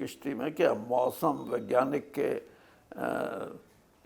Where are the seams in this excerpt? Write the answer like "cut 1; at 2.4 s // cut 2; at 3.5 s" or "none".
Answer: none